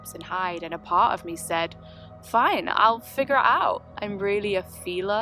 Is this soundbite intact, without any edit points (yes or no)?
yes